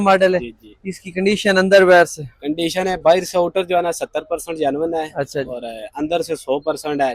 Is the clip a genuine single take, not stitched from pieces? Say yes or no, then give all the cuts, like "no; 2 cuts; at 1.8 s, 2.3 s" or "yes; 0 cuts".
yes; 0 cuts